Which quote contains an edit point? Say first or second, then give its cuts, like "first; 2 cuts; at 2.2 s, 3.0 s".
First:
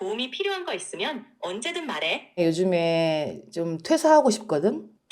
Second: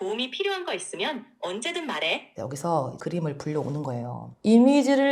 second; 2 cuts; at 2.3 s, 3.0 s